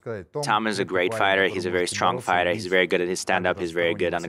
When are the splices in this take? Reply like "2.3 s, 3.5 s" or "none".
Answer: none